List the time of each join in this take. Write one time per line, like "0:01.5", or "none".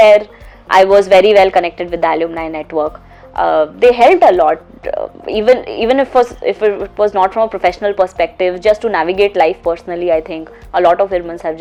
none